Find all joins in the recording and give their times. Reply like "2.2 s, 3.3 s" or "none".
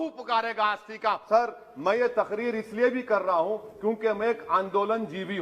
1.2 s